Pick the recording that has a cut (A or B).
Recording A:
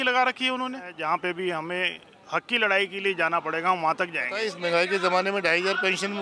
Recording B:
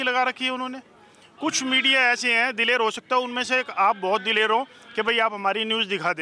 A